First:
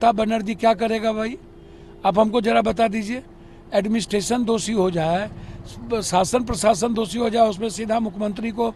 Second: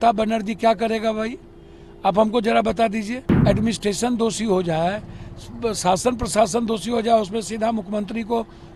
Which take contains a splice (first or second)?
second